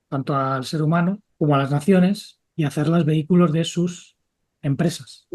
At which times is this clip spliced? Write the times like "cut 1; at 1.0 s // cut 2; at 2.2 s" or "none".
cut 1; at 1.3 s